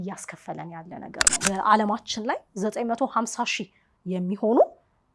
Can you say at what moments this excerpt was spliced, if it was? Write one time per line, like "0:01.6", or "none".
0:01.3